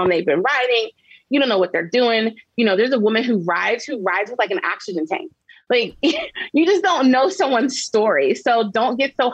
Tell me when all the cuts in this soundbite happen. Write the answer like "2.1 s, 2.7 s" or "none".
none